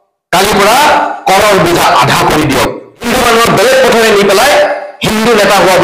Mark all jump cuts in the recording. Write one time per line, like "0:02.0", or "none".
0:03.0